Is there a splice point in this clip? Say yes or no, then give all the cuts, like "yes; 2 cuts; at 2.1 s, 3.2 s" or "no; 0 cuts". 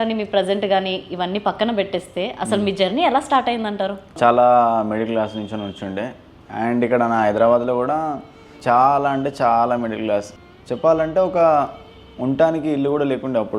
yes; 3 cuts; at 4.1 s, 8.4 s, 10.4 s